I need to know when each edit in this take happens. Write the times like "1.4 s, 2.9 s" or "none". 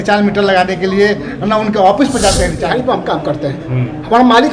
2.8 s